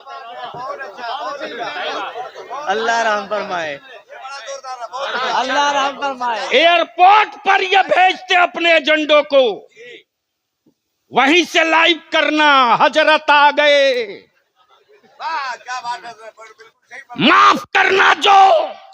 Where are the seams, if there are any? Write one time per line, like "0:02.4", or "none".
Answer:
none